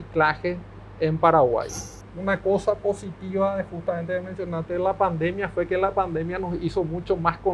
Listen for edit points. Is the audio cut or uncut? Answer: cut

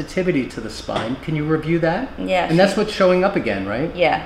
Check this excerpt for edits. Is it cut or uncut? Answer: uncut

